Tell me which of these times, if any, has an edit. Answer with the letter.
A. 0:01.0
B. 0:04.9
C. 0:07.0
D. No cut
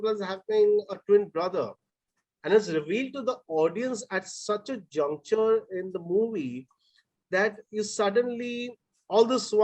D